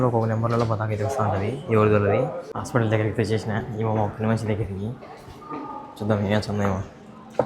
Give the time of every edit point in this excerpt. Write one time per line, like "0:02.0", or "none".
0:02.5